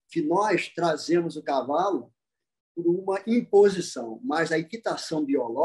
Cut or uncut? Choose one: uncut